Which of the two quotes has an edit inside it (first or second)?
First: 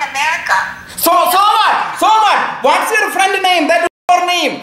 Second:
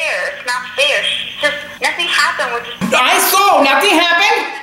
second